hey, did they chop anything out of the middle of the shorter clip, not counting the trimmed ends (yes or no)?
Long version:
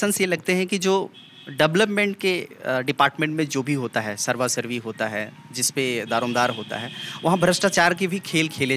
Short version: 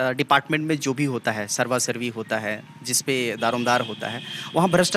no